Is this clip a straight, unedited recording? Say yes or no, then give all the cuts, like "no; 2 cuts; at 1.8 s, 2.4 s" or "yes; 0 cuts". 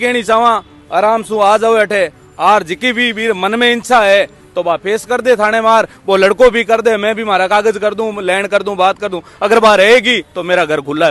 yes; 0 cuts